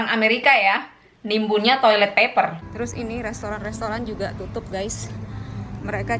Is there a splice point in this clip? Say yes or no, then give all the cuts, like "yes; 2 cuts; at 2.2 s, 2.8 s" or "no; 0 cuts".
yes; 1 cut; at 2.6 s